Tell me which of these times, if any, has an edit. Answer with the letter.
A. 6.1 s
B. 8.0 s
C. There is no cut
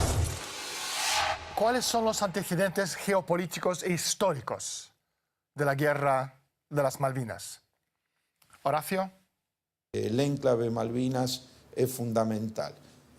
A